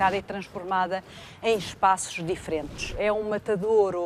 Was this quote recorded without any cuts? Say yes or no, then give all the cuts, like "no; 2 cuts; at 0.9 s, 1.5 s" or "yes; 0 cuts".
no; 1 cut; at 3.0 s